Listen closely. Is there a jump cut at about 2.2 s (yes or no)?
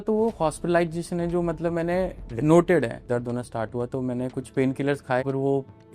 yes